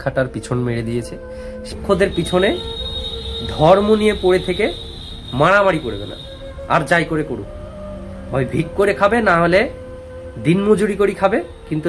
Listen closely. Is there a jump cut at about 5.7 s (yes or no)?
no